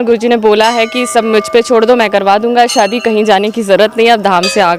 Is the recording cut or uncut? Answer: uncut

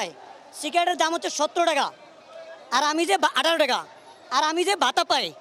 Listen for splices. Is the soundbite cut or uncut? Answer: uncut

